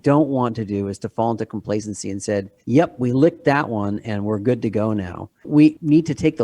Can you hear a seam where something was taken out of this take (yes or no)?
yes